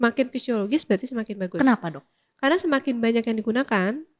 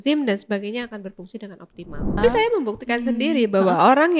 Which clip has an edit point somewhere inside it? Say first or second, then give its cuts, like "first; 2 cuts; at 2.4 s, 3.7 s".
second; 1 cut; at 2.2 s